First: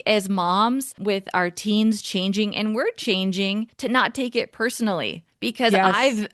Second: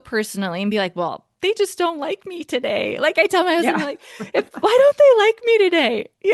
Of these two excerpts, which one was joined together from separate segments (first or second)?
first